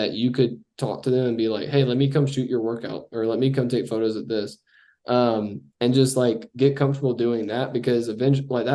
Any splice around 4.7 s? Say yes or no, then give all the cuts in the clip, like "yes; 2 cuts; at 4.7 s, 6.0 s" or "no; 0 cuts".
no; 0 cuts